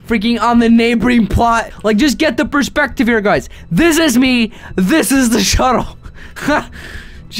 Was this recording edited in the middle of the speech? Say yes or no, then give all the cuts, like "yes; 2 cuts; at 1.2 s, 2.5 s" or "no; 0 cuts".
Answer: yes; 1 cut; at 1.7 s